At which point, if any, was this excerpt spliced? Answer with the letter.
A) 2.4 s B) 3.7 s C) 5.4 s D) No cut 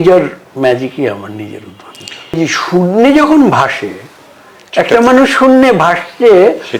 A